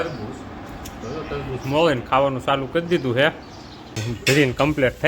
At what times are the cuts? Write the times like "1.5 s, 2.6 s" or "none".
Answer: 4.1 s